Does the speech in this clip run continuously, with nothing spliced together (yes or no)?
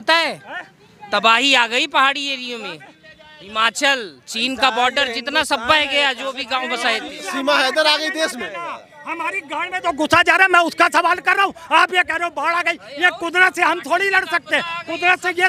yes